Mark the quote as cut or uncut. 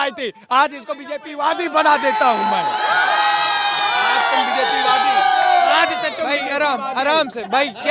uncut